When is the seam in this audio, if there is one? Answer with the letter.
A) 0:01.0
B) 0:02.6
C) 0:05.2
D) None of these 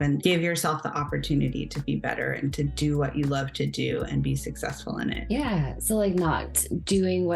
C